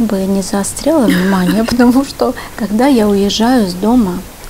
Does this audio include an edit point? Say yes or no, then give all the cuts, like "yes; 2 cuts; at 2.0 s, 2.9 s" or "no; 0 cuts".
no; 0 cuts